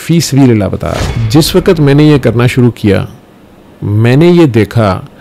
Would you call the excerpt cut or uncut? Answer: cut